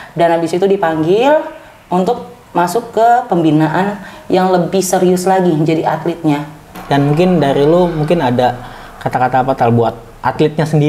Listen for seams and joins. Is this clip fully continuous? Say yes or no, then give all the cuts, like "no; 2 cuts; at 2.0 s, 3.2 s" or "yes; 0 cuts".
no; 1 cut; at 6.7 s